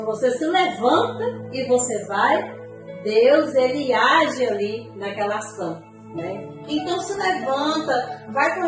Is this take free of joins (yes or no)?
no